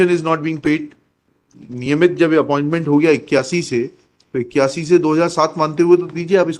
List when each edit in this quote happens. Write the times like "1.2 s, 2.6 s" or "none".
1.5 s